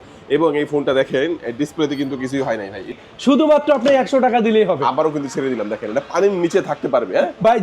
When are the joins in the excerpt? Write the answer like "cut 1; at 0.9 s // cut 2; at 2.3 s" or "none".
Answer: cut 1; at 2.9 s